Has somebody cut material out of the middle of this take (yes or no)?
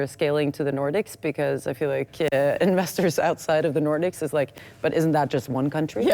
no